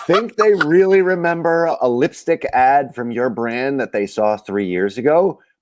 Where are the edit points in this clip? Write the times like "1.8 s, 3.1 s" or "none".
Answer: 1.7 s